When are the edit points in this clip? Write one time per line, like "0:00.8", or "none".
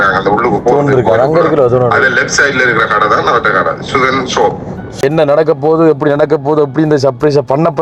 0:05.0